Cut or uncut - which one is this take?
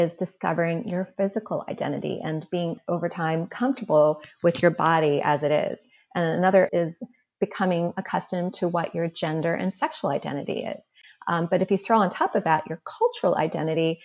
cut